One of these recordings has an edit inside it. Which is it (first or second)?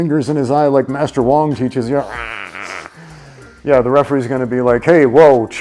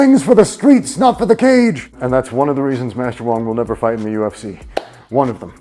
second